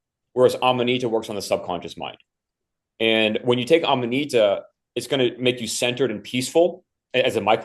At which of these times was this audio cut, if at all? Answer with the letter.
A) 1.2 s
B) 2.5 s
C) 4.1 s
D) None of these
D